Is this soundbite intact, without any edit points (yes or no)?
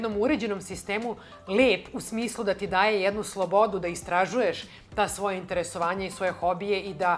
yes